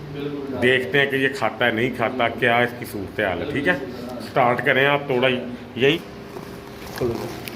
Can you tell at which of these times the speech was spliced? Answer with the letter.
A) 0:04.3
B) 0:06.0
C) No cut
B